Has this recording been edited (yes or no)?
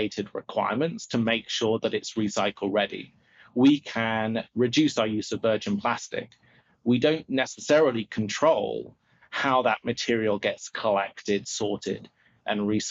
no